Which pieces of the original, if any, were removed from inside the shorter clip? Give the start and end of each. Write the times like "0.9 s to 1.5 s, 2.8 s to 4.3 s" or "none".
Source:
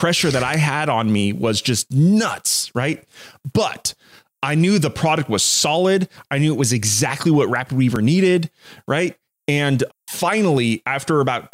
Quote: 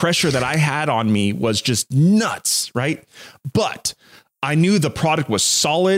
none

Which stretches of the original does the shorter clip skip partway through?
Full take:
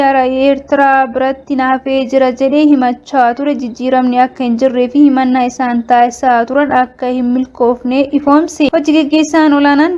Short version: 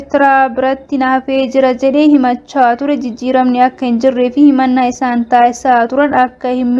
none

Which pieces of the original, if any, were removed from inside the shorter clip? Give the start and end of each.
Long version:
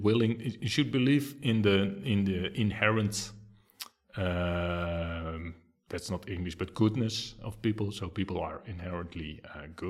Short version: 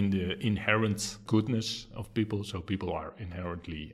3.4 s to 6.7 s

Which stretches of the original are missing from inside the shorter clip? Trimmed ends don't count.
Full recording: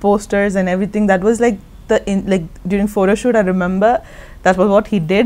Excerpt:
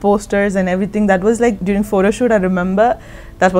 1.6 s to 2.6 s

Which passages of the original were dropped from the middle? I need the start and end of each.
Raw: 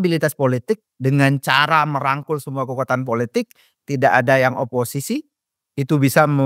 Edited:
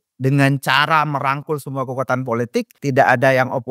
3.5 s to 3.8 s

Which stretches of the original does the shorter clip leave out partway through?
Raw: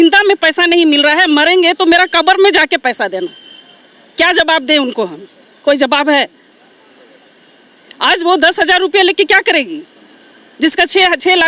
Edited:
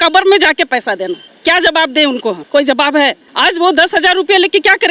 3.4 s to 4.0 s, 5.1 s to 5.5 s, 6.4 s to 7.9 s

